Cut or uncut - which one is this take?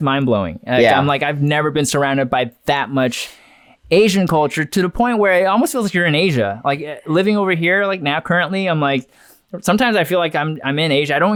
uncut